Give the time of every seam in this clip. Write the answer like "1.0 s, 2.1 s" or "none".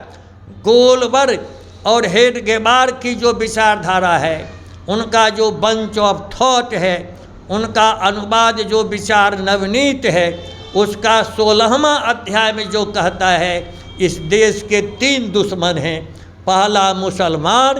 none

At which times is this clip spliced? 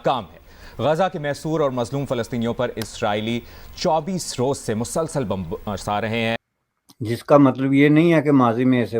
6.4 s

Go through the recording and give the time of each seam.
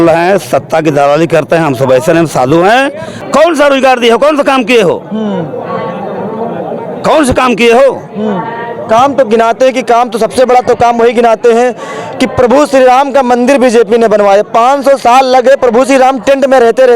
3.1 s

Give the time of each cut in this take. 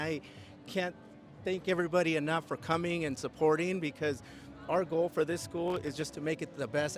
none

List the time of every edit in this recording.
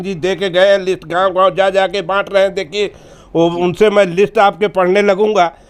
none

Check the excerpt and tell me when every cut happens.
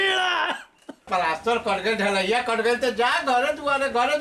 1.1 s

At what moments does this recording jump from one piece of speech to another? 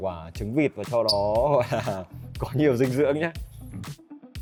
none

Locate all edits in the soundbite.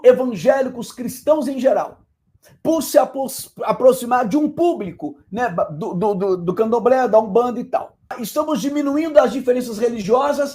8.2 s

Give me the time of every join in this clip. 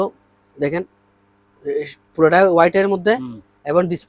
none

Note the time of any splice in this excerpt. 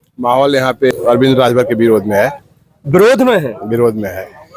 0.9 s

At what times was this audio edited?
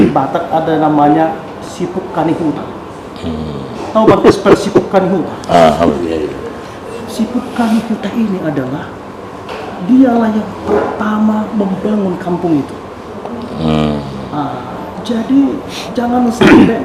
none

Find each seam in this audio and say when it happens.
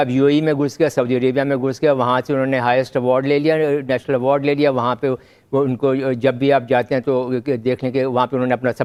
none

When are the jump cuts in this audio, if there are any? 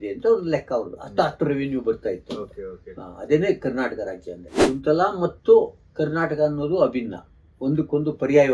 4.5 s

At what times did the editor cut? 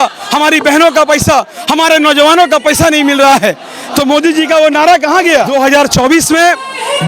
5.5 s

